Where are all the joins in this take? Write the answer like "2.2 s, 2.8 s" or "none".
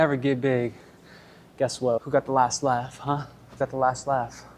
2.0 s, 3.6 s